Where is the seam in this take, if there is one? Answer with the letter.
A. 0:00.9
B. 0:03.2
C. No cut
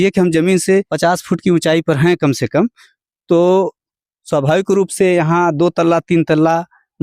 A